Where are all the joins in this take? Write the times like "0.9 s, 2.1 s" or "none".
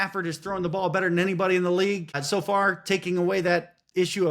2.2 s